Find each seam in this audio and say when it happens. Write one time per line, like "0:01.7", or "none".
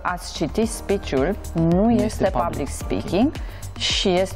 none